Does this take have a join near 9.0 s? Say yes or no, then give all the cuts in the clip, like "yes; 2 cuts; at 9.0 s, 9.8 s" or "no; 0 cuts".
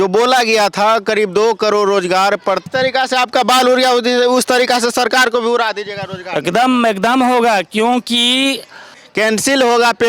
yes; 2 cuts; at 2.6 s, 9.0 s